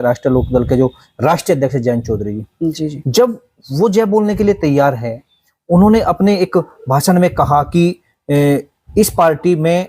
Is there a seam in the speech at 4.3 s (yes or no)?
no